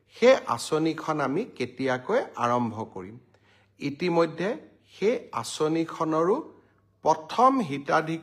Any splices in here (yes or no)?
no